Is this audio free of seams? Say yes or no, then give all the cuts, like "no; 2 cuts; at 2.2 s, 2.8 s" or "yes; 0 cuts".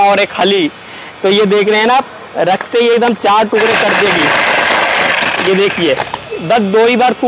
yes; 0 cuts